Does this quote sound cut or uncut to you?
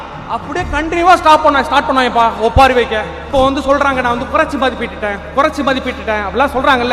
cut